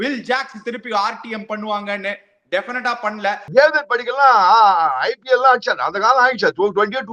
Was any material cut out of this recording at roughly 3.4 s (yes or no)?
yes